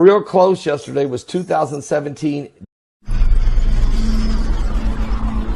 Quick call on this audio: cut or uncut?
uncut